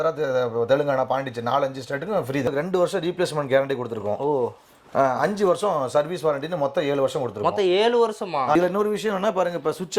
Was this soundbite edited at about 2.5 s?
yes; 2 cuts; at 2.5 s, 8.6 s

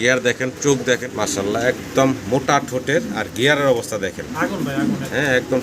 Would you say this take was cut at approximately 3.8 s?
no; 1 cut; at 1.1 s

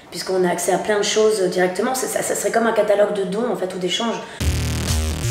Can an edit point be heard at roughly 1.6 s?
no; 1 cut; at 4.4 s

